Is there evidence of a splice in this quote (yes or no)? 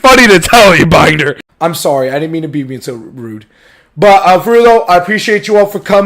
yes